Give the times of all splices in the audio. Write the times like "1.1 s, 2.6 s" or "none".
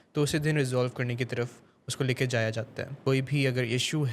3.0 s